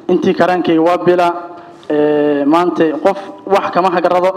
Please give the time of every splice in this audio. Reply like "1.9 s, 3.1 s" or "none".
none